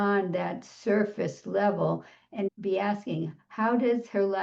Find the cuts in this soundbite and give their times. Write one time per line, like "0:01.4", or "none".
0:02.5